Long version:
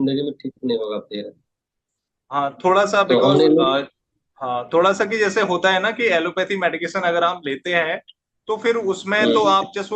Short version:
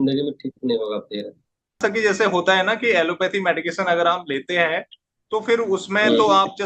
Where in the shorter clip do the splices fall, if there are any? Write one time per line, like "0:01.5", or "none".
0:01.8